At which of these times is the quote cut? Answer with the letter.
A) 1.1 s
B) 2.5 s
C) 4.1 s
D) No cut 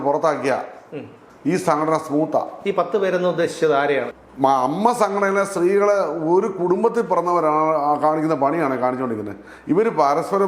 C